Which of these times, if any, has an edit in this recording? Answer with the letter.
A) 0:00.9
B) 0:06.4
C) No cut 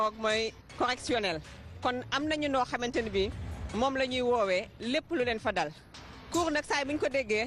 C